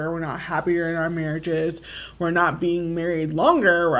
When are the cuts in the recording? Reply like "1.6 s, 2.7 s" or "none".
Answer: none